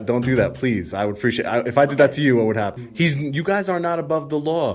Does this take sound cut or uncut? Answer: cut